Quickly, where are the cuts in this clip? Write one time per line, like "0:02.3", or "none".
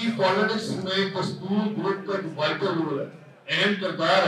none